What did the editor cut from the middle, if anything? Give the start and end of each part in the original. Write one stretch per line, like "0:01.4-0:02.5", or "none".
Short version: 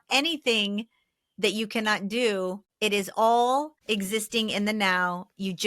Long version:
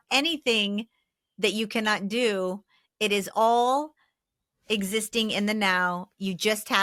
0:02.7-0:02.8
0:04.0-0:04.6